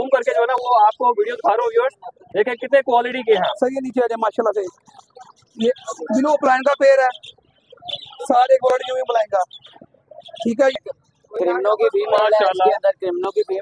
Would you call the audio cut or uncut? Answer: cut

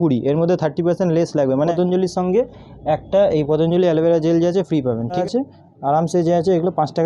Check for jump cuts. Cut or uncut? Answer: cut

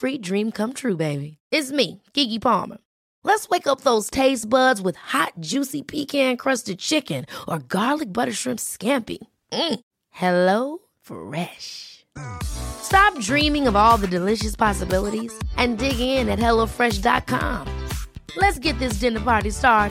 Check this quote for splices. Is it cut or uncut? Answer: uncut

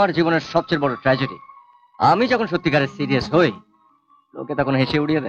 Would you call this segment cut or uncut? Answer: uncut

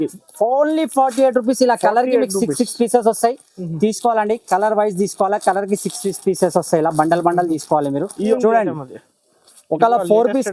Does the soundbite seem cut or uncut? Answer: cut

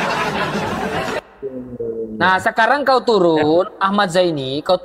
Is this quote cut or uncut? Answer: uncut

